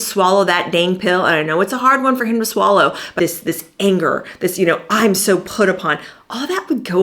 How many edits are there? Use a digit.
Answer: 1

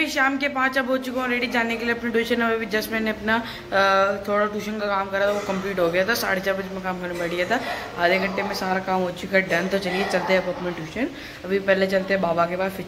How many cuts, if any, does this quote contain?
0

